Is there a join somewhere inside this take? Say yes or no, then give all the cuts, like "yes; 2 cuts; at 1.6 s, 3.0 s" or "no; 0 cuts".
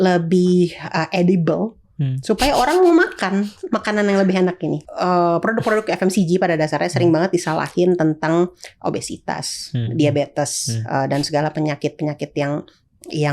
yes; 1 cut; at 4.8 s